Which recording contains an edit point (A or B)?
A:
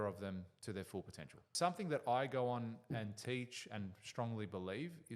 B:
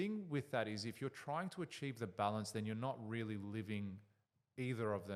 A